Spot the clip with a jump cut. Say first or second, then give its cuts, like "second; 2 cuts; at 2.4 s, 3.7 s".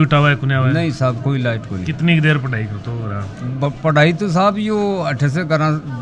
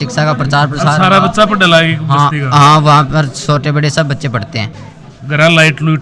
second; 1 cut; at 4.7 s